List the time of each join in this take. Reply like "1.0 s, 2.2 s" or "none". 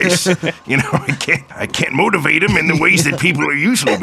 1.0 s